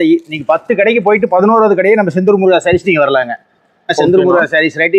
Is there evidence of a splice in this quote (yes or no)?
yes